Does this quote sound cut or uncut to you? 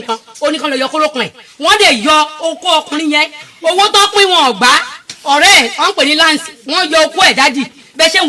uncut